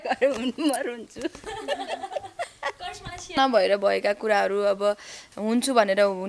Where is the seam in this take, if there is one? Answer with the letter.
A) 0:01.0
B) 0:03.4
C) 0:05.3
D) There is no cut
B